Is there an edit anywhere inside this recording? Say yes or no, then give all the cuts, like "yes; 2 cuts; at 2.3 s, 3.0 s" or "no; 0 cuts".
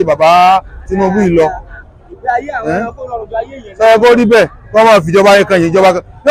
no; 0 cuts